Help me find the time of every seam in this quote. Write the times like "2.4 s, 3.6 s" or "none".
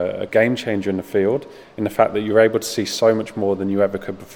none